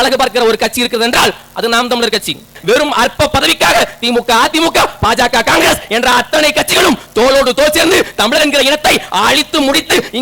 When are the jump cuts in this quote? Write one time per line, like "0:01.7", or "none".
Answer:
0:02.6